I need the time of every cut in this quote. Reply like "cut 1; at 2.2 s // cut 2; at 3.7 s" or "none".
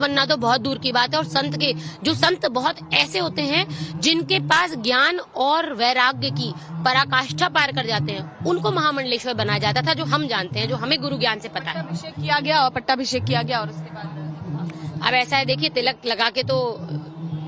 cut 1; at 5.6 s